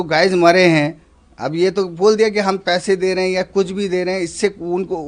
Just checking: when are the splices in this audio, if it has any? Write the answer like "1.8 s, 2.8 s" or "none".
none